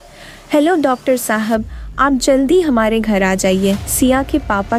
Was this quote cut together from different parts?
no; 0 cuts

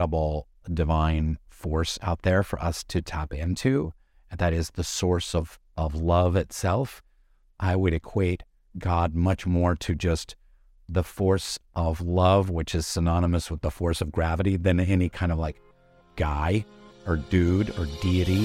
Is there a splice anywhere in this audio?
no; 0 cuts

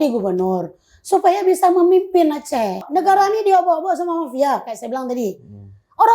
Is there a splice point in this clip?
yes; 1 cut; at 2.8 s

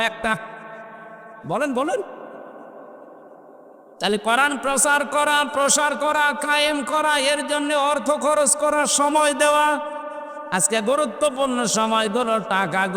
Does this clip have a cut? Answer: no; 0 cuts

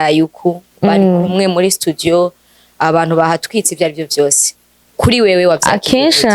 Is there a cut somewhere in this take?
no; 0 cuts

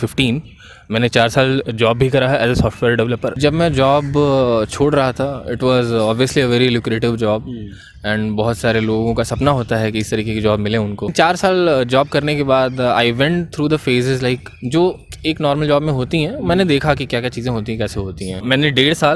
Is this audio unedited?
no; 3 cuts; at 3.4 s, 11.1 s, 18.4 s

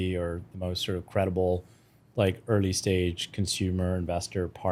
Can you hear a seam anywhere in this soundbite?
no; 0 cuts

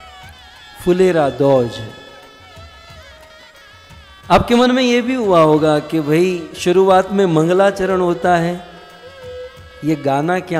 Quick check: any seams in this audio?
no; 0 cuts

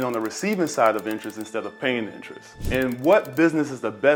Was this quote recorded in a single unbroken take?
yes; 0 cuts

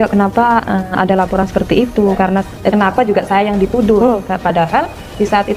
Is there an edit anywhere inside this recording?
no; 0 cuts

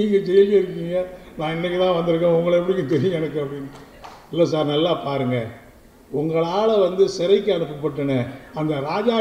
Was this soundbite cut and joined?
no; 0 cuts

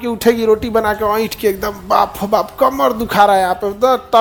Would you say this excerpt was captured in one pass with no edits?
yes; 0 cuts

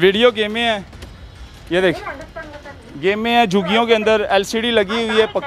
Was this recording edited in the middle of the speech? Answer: no; 0 cuts

